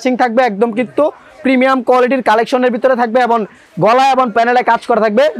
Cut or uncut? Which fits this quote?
uncut